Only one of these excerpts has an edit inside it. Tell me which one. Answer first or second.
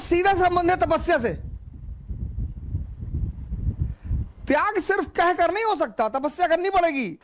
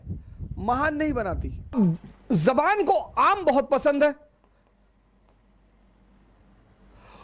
second